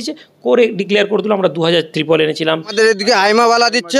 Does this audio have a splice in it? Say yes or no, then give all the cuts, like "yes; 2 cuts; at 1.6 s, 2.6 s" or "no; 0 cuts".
yes; 1 cut; at 2.7 s